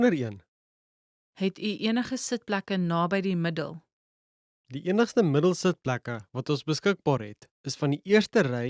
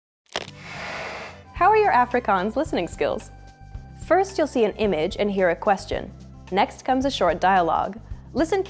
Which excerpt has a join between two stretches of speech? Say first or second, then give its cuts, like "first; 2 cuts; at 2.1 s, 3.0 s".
second; 2 cuts; at 1.4 s, 3.2 s